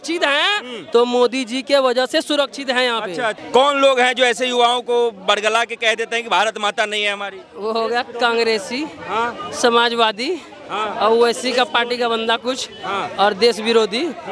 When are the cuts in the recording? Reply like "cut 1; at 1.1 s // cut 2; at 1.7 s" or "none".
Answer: cut 1; at 3.4 s